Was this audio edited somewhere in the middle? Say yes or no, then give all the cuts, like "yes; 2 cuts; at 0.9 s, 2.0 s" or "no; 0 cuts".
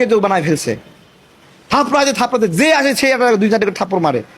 no; 0 cuts